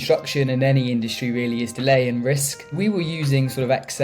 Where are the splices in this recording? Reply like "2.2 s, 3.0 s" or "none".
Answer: 1.7 s, 2.7 s